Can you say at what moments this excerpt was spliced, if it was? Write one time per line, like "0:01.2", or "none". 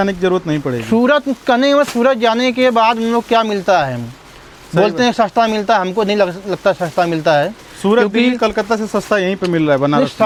none